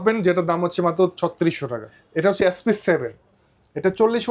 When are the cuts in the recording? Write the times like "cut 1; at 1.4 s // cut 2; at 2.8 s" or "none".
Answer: cut 1; at 2.2 s